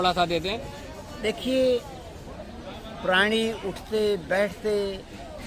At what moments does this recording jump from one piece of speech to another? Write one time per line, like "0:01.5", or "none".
none